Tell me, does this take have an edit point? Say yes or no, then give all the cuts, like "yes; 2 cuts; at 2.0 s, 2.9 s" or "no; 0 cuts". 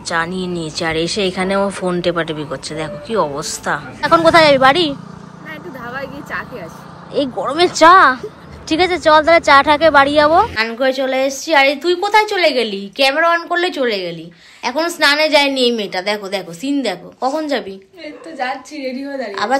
yes; 2 cuts; at 4.1 s, 10.6 s